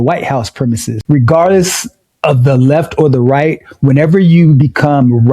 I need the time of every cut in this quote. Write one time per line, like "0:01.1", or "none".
0:00.9